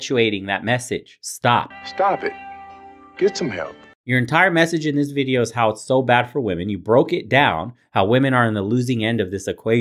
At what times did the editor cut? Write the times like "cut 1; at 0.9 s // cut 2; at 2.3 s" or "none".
none